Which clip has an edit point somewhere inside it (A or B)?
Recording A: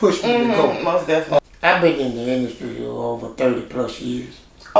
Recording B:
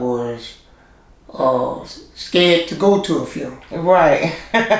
A